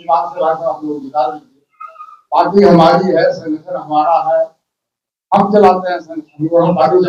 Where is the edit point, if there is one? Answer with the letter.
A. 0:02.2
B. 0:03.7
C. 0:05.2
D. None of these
D